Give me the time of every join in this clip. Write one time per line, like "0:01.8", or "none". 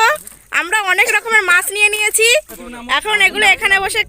0:03.0